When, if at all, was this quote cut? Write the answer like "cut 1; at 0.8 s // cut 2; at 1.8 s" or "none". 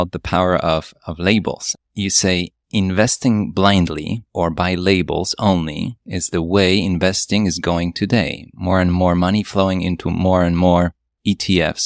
cut 1; at 1.7 s